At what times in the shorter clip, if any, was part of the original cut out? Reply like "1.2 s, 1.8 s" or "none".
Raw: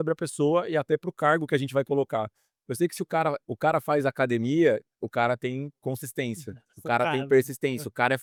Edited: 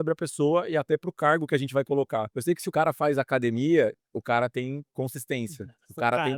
2.6 s